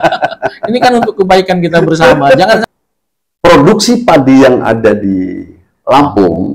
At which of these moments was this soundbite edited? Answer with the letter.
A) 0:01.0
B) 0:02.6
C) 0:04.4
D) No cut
B